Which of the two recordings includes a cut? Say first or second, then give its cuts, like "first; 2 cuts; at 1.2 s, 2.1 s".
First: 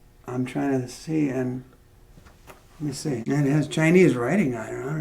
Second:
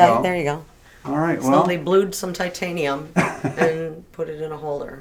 first; 1 cut; at 3.2 s